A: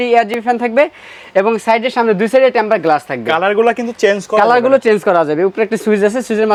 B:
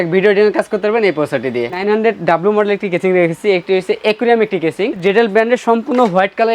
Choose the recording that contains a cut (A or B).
B